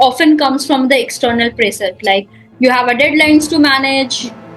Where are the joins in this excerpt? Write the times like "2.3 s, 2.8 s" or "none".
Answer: none

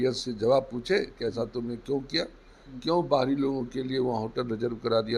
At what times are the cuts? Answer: 3.8 s

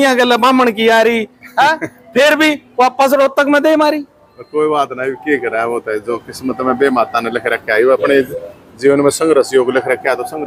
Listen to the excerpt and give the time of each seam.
none

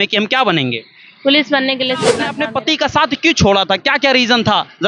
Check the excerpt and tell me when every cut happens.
2.3 s

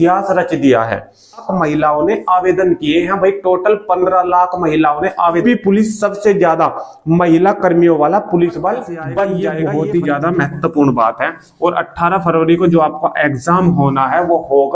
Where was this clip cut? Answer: 1.5 s, 5.4 s, 9.5 s

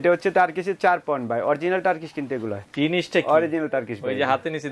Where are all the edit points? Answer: 2.6 s

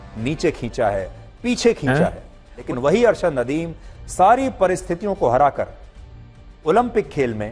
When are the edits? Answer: none

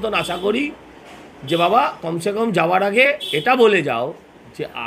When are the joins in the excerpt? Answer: none

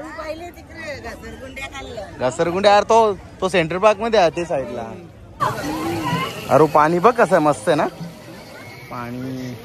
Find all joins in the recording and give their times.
5.3 s

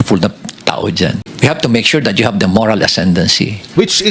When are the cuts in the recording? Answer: 1.2 s

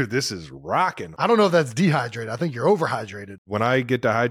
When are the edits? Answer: 1.1 s, 3.3 s

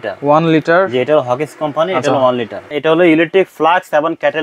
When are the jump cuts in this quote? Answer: 2.7 s

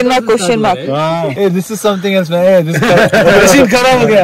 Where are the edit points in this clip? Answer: 1.3 s

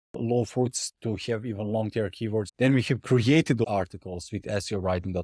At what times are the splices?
2.5 s, 3.6 s

